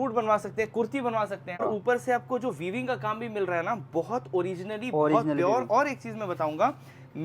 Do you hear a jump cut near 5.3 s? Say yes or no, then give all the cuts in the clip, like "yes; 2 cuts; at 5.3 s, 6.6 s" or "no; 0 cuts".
no; 1 cut; at 1.6 s